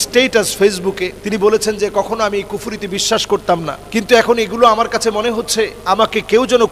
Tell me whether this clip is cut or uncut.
cut